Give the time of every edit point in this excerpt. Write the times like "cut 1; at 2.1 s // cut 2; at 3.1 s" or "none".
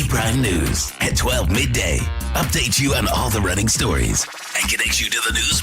none